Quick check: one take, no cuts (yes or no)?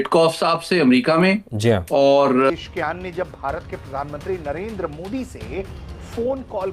no